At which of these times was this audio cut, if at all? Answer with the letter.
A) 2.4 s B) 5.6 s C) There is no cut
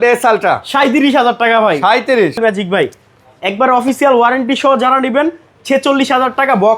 A